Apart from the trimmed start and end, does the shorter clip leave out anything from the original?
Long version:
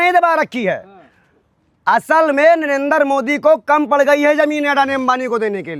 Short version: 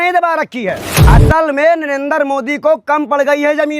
yes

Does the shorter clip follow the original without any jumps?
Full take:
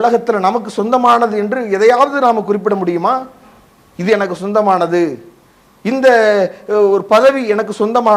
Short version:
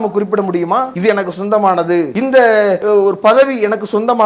no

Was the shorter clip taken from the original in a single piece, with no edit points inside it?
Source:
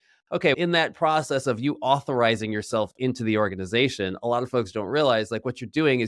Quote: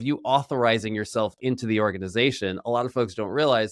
yes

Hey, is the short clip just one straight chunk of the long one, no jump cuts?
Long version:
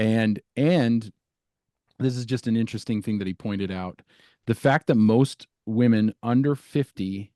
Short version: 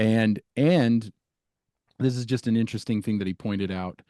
yes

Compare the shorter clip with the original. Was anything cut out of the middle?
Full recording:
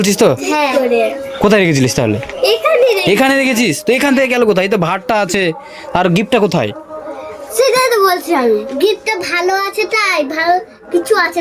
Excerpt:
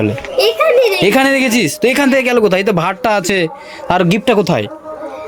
no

